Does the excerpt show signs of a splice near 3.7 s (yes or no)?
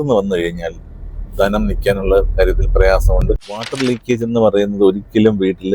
yes